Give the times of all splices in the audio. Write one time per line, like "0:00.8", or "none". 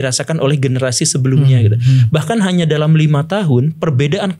none

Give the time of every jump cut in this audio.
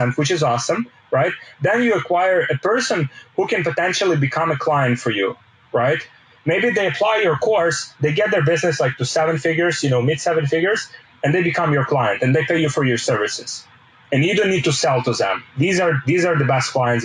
none

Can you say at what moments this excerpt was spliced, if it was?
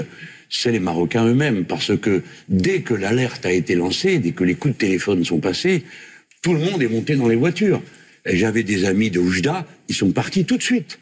none

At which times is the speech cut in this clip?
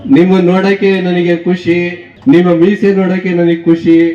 0:02.0

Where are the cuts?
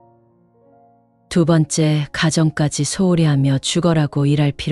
0:01.0

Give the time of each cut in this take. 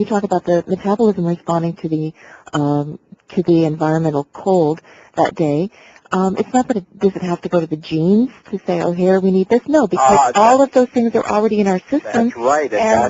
0:05.9

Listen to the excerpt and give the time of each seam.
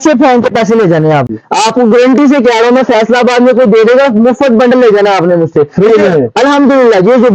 0:01.4

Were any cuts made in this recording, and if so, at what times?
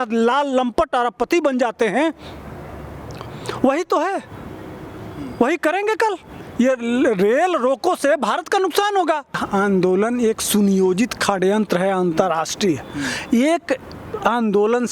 0:09.4

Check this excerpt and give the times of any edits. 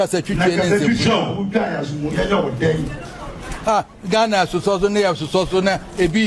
none

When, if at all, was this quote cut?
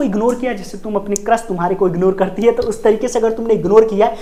none

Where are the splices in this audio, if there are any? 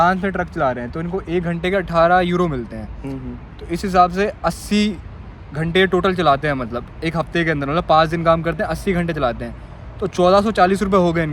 none

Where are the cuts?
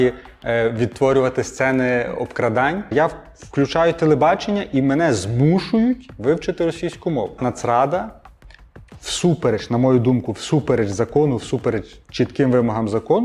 0:02.9
0:07.4

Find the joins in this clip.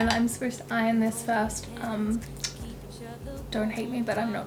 none

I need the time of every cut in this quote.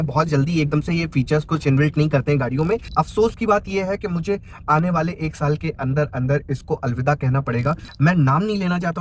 0:02.9
0:07.9

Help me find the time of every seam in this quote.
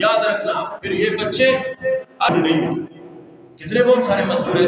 0:02.3

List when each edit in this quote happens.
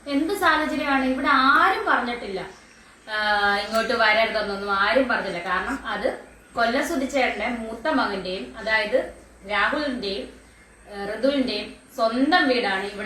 none

